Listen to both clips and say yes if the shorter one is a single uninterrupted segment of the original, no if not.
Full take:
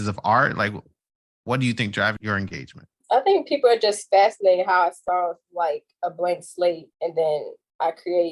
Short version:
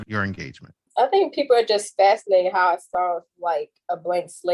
yes